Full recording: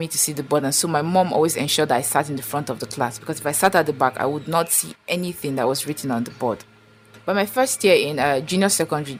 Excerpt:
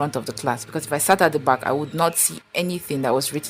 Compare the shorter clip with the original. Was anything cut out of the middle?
no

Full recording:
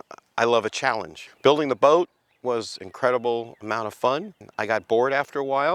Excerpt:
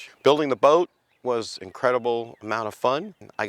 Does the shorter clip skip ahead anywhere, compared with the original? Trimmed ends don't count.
no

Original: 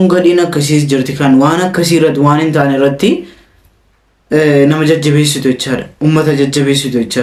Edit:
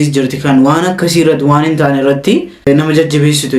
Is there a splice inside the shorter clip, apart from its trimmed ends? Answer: yes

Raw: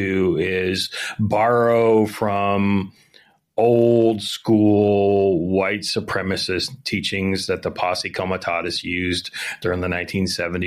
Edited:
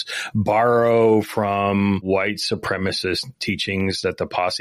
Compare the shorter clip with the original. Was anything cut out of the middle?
yes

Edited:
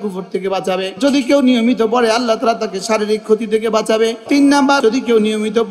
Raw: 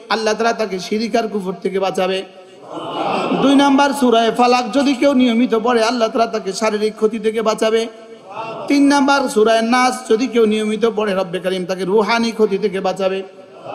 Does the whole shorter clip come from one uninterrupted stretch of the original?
no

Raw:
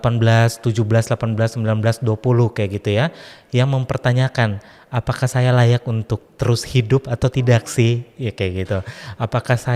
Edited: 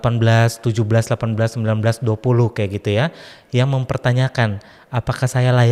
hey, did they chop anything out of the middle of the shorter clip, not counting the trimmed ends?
no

